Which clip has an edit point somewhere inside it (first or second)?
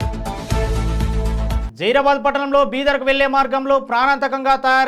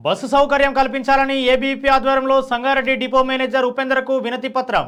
first